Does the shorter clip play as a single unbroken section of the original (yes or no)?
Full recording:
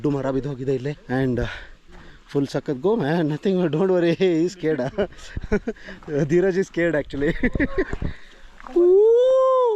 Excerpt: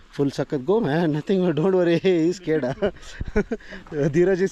yes